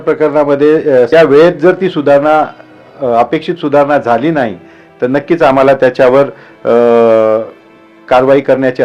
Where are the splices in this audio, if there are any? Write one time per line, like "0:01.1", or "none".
0:01.1